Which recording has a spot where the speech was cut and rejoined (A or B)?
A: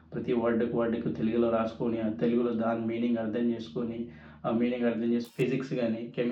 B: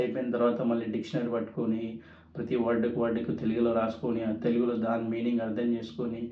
A